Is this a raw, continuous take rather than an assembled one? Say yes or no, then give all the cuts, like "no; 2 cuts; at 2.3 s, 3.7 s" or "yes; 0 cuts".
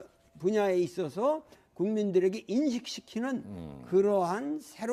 yes; 0 cuts